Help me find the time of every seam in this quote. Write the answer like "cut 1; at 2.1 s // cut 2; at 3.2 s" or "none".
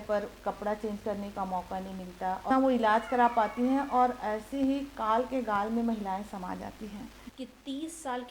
cut 1; at 2.5 s // cut 2; at 7.2 s